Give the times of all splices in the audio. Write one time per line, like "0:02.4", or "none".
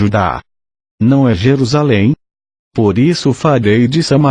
none

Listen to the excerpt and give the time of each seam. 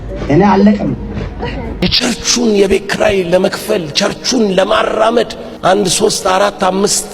0:01.9
0:05.4

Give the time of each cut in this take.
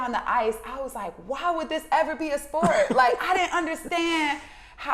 none

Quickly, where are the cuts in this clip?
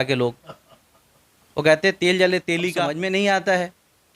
0:02.9

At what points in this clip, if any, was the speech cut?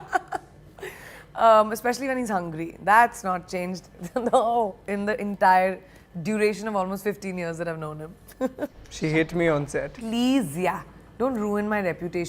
0:08.8

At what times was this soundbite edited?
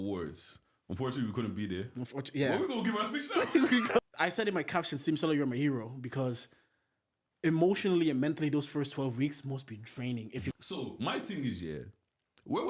0:04.0
0:10.5

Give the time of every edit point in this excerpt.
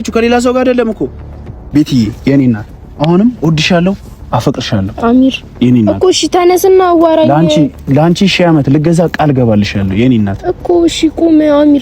0:01.5

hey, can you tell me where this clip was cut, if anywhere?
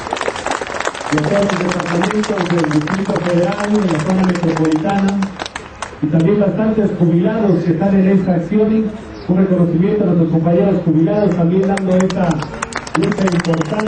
0:03.7

